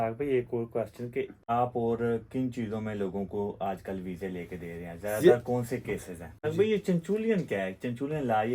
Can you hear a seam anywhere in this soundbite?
yes; 2 cuts; at 1.4 s, 6.3 s

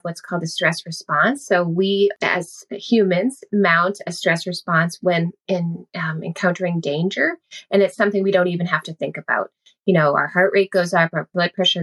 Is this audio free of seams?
no; 2 cuts; at 2.2 s, 5.4 s

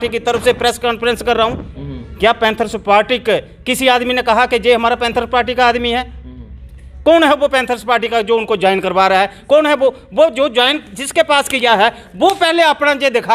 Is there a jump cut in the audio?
no; 0 cuts

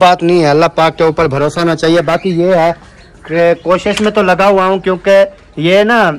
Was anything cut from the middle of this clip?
no; 0 cuts

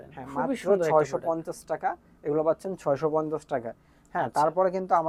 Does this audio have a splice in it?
no; 0 cuts

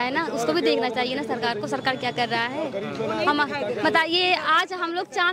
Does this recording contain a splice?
no; 0 cuts

